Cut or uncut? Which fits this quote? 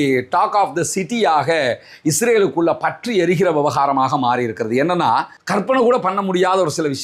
uncut